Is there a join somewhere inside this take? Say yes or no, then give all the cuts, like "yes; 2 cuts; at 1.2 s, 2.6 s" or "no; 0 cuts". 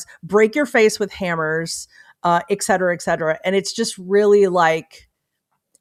no; 0 cuts